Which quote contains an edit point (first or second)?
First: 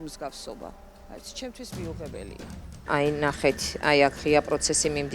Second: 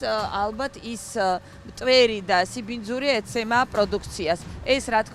first